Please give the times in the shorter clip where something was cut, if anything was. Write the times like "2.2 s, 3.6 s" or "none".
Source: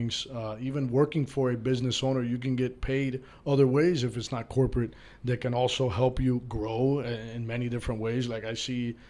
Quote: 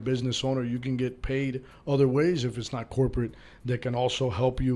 none